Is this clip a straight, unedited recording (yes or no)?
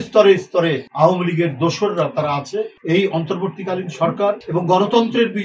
no